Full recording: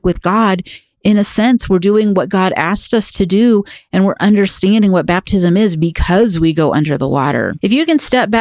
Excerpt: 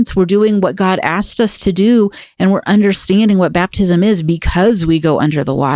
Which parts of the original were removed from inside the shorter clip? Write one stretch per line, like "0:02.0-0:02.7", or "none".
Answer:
none